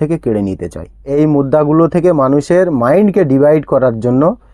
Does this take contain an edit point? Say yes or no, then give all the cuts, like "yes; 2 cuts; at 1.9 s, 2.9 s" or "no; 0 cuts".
yes; 1 cut; at 1.1 s